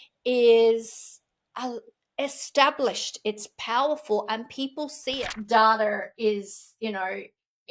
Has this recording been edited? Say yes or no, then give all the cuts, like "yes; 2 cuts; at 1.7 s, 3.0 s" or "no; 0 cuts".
yes; 1 cut; at 5.1 s